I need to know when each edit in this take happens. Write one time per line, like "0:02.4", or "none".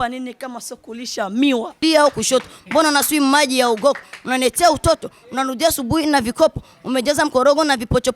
0:01.8